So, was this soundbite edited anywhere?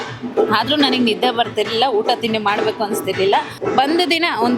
yes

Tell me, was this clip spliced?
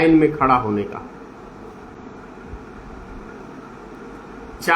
no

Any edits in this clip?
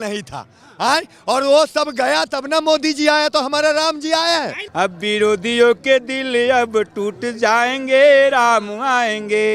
yes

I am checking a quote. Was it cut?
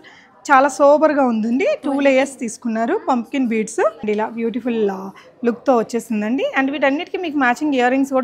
yes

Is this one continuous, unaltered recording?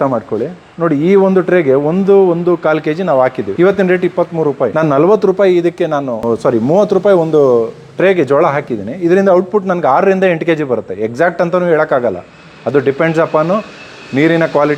no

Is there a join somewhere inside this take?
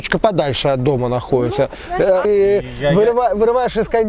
yes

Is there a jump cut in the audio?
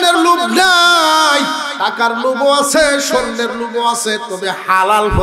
yes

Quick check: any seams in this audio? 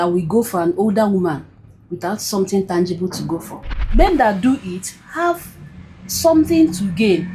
yes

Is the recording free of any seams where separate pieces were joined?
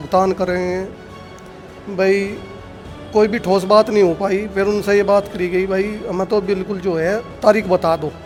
yes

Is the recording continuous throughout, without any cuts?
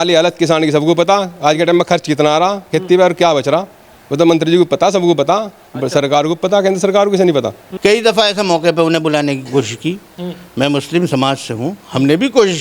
no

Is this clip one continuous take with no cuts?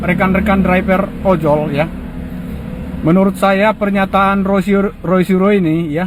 yes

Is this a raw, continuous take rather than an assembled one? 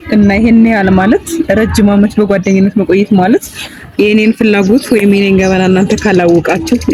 yes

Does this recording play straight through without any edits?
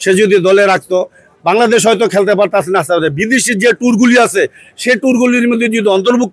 yes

